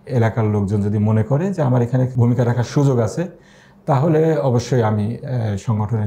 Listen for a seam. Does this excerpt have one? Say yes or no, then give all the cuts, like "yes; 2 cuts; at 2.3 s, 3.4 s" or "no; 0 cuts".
no; 0 cuts